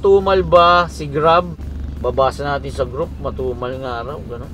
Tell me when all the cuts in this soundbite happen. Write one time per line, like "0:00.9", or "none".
0:01.6